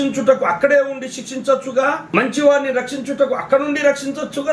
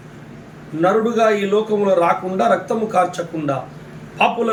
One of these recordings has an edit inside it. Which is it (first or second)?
first